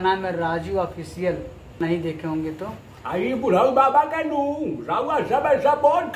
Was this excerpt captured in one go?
no; 1 cut; at 1.8 s

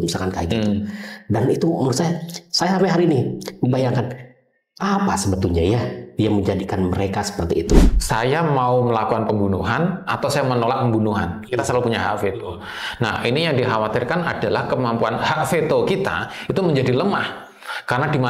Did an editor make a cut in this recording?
yes; 1 cut; at 7.9 s

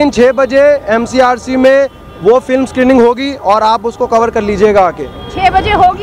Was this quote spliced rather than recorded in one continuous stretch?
no; 0 cuts

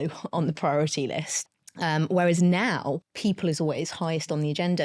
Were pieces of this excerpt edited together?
yes; 2 cuts; at 1.3 s, 3.0 s

